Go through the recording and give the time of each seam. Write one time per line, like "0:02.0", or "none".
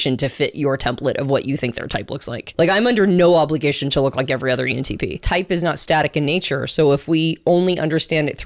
0:02.5
0:05.2